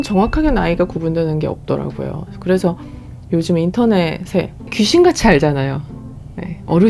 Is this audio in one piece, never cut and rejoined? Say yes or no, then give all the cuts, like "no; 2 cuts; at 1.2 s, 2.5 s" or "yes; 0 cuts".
no; 1 cut; at 4.6 s